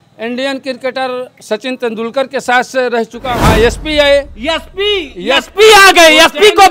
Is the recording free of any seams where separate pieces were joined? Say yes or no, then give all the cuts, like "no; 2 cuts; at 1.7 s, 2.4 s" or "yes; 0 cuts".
no; 1 cut; at 3.3 s